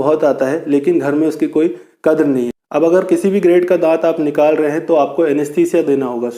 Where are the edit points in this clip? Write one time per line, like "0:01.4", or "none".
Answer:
0:02.6